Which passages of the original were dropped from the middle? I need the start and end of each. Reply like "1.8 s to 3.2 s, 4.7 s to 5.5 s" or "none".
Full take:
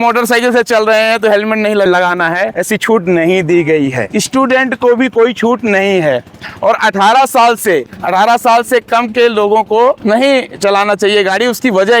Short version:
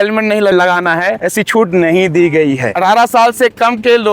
4.0 s to 8.0 s

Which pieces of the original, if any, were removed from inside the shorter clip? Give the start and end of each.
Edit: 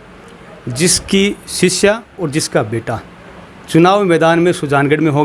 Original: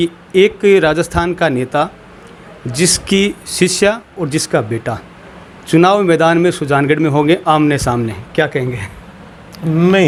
none

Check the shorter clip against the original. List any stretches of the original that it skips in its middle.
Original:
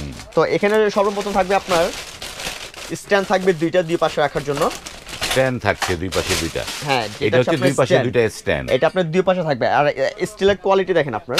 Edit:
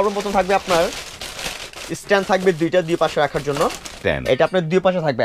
5.0 s to 8.4 s

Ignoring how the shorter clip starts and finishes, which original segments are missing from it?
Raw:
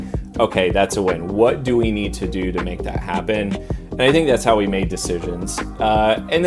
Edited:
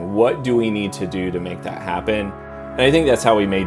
none

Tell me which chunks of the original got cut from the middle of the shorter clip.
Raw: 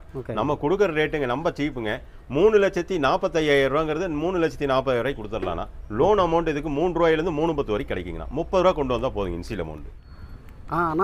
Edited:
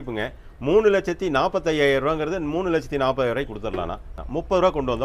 5.8 s to 8.1 s

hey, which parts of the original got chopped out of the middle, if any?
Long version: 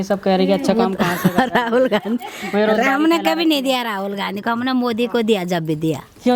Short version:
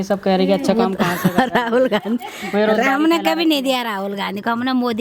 none

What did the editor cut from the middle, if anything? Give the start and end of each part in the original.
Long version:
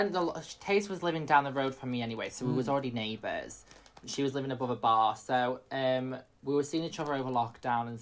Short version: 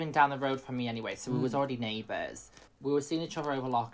3.8 s to 6.3 s

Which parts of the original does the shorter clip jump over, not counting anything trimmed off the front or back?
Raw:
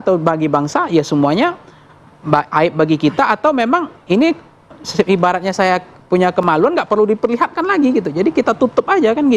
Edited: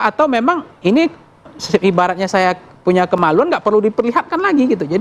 none

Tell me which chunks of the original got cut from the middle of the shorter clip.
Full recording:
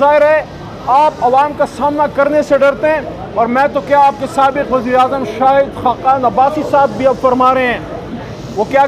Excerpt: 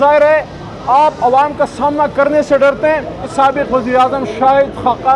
3.2 s to 4.2 s

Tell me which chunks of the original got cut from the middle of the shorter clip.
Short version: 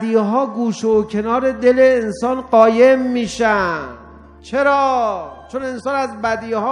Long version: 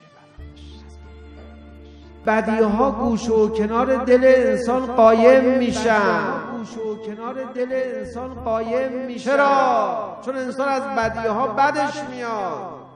6.8 s to 9.1 s

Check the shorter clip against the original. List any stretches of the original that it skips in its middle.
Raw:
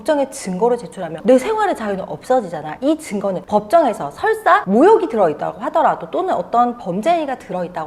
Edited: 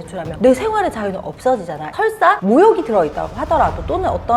2.7 s to 4.1 s

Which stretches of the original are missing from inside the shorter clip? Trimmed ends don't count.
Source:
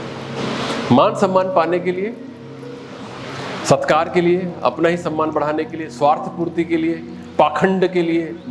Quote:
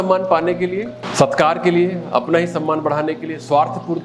2.2 s to 3.5 s

